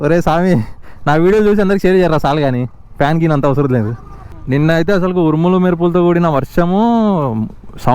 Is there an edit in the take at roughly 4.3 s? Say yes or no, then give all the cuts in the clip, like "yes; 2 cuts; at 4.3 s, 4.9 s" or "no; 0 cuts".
yes; 1 cut; at 4.3 s